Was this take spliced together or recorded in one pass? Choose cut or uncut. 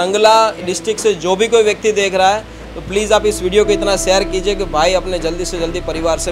uncut